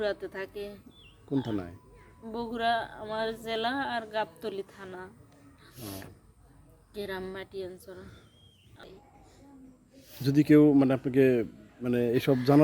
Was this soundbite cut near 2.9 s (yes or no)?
no